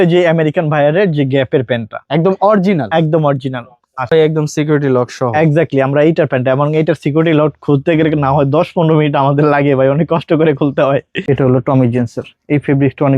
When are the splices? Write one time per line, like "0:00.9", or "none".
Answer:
0:04.1
0:11.1